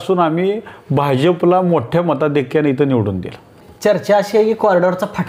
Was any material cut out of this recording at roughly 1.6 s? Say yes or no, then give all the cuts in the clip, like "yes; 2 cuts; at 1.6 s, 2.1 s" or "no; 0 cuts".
no; 1 cut; at 3.7 s